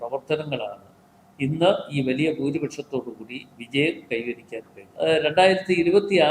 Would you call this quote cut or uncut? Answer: cut